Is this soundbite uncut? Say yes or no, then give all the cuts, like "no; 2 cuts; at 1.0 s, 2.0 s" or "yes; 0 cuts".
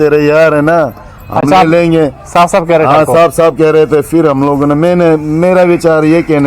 yes; 0 cuts